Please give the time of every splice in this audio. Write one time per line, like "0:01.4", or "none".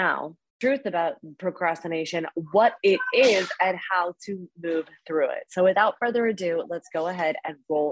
none